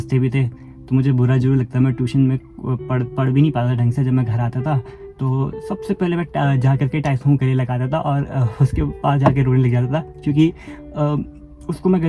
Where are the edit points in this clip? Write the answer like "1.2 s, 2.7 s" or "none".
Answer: none

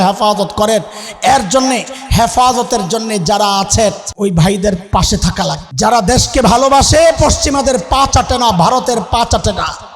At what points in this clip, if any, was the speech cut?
4.1 s, 5.6 s

